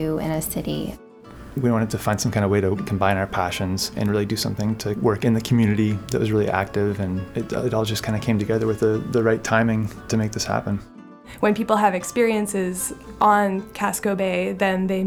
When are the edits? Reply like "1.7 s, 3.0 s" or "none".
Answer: 1.0 s, 2.9 s, 3.9 s, 5.0 s, 6.0 s, 7.3 s, 10.0 s, 11.2 s